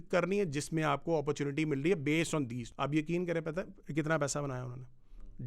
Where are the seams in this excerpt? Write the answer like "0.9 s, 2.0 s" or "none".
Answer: 2.6 s